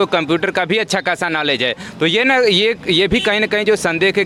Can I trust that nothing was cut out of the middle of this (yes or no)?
yes